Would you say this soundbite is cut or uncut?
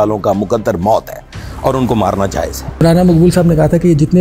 cut